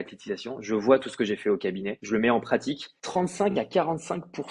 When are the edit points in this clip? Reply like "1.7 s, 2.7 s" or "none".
1.9 s, 2.9 s